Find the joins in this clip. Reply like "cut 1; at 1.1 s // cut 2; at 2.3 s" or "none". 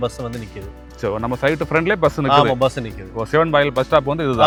none